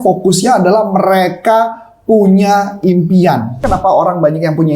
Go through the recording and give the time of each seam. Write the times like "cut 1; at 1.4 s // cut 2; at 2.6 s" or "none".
cut 1; at 3.6 s